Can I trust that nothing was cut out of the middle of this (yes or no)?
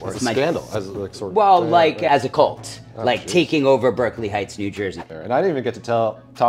no